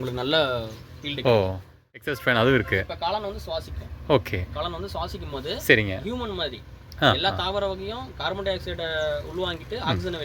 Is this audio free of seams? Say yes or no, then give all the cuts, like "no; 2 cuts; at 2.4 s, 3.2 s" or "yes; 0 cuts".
no; 1 cut; at 2.0 s